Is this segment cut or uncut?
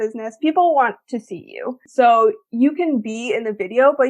cut